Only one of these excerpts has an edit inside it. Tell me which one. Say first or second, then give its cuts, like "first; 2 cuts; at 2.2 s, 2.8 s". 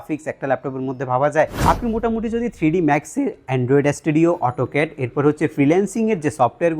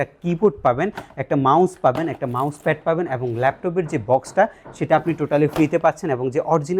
first; 1 cut; at 1.6 s